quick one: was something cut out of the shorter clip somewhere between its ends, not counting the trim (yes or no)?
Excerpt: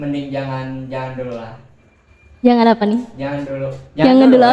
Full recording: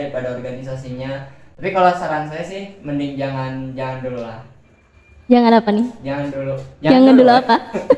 no